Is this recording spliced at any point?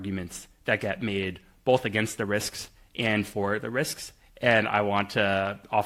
no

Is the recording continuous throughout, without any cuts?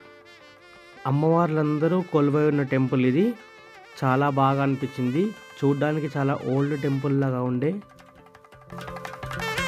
yes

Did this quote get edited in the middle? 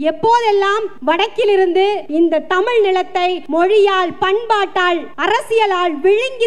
yes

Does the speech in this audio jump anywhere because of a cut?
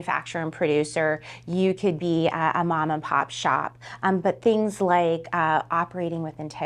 no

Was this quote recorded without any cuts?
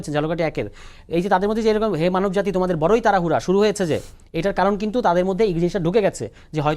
yes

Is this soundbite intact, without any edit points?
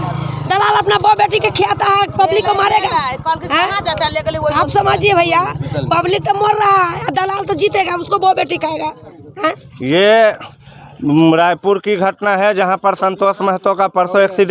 yes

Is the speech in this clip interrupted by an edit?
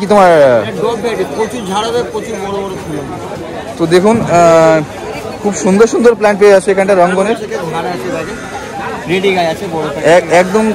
no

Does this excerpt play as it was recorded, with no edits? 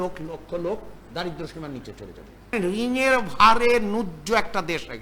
no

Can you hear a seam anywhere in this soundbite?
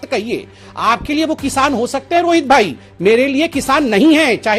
no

